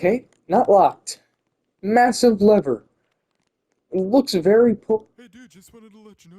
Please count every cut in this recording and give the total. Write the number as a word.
one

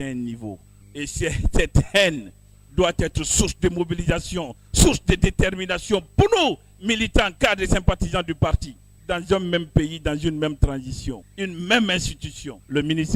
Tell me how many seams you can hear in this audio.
zero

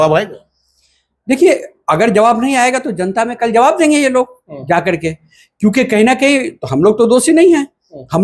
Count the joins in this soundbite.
zero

